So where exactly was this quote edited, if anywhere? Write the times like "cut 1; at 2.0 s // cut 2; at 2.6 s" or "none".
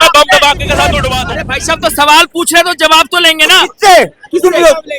cut 1; at 1.1 s